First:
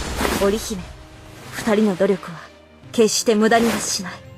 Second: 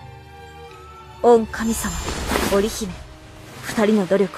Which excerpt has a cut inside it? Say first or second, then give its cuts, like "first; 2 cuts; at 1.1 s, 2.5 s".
second; 1 cut; at 1.2 s